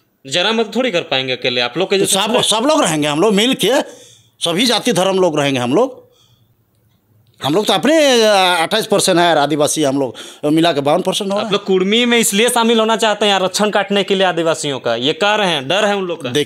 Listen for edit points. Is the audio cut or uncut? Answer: uncut